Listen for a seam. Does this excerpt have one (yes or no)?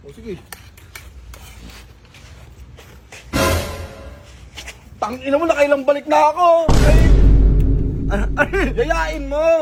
no